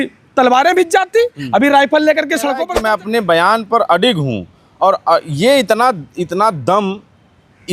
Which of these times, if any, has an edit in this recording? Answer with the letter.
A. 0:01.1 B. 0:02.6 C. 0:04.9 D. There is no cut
B